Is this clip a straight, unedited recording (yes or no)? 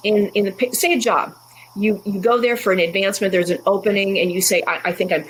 yes